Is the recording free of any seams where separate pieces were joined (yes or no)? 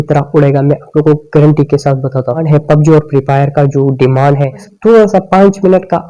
no